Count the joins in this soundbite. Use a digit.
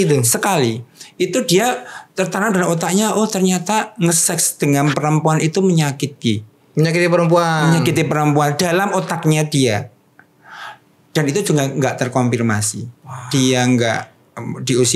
0